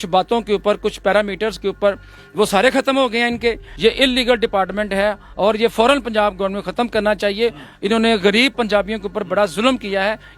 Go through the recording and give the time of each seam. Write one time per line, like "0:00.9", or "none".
0:03.7